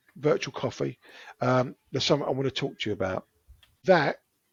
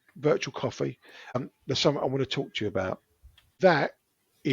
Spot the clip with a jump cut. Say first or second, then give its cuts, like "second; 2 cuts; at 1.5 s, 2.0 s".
second; 1 cut; at 1.4 s